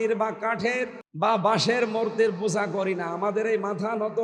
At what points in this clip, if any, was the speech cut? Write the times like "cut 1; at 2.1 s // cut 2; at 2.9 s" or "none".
cut 1; at 1.0 s